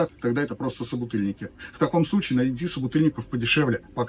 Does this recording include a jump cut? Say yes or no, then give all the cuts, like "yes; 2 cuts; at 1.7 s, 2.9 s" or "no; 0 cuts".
no; 0 cuts